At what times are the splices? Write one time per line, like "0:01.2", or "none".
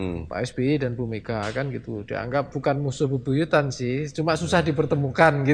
0:02.5